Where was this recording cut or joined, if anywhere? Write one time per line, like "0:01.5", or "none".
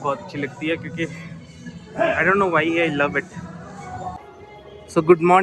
0:04.2

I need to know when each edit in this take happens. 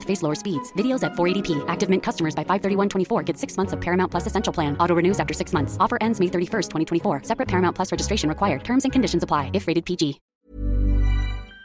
0:10.3

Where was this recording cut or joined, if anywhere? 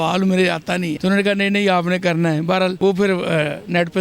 0:00.9
0:02.8

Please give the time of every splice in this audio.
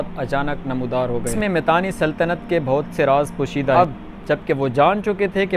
0:01.3
0:03.8

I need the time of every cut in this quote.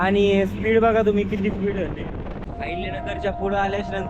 0:02.4

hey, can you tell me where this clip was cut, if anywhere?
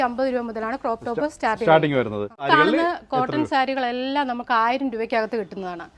0:02.5

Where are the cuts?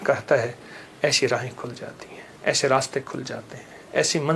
none

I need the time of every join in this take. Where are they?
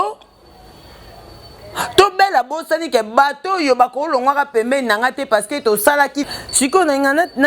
0:06.3

